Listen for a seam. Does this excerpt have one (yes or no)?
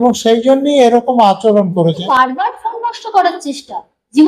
yes